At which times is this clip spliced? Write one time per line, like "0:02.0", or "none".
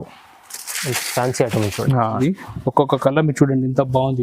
0:02.2